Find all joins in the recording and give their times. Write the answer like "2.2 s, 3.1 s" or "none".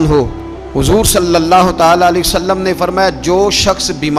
none